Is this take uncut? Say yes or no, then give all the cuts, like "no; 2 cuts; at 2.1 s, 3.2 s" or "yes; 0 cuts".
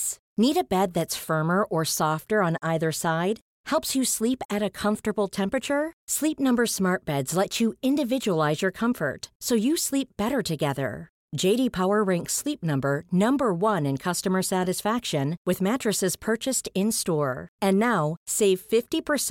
yes; 0 cuts